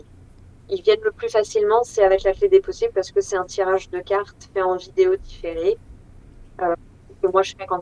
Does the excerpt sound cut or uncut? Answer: uncut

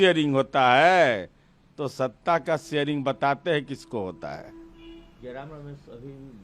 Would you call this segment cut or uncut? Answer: uncut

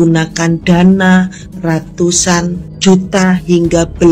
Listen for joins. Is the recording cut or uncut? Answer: cut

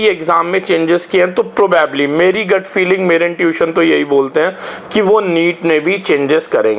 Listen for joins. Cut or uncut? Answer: uncut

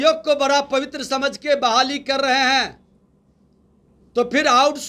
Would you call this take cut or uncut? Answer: uncut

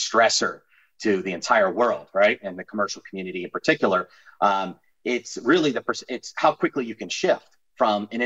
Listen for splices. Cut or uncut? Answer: uncut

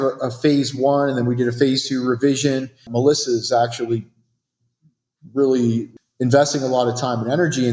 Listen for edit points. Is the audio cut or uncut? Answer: cut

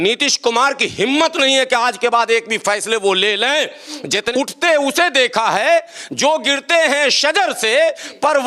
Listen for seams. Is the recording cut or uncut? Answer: cut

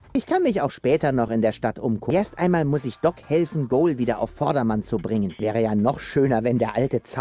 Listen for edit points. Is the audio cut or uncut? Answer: cut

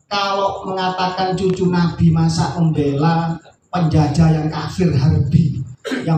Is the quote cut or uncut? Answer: uncut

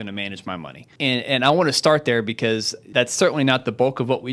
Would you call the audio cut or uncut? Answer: cut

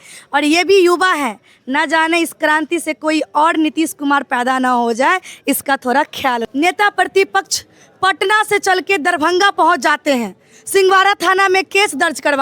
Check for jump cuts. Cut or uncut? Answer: cut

